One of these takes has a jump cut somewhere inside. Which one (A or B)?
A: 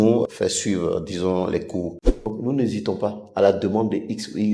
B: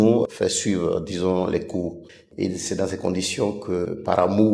A